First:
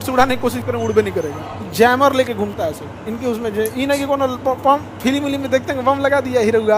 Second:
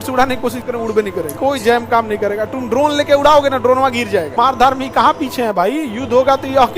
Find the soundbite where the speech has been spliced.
second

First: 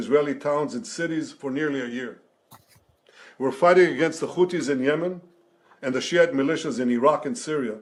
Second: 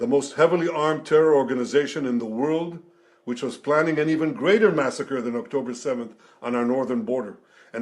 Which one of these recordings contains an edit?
second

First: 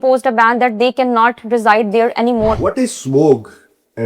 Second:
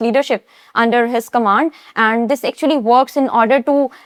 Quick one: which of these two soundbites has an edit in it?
first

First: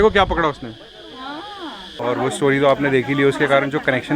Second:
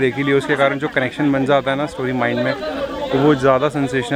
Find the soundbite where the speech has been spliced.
first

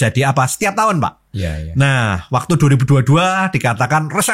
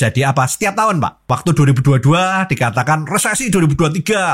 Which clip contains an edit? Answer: second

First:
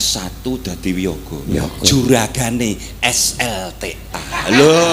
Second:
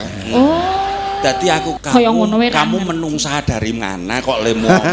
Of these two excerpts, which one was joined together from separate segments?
second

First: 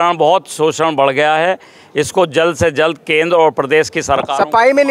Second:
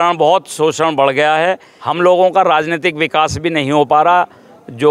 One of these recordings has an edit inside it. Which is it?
second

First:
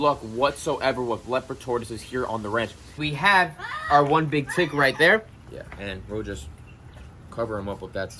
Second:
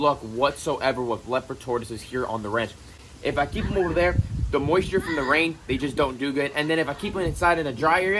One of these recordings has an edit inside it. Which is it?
first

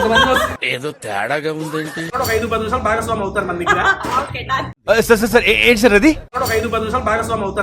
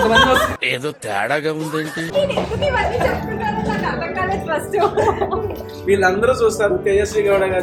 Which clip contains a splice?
first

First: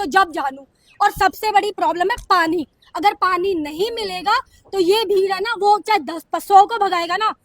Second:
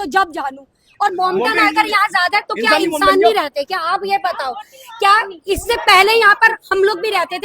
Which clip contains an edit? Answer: second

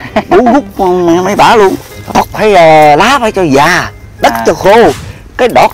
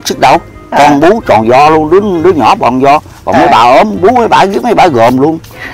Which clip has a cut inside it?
first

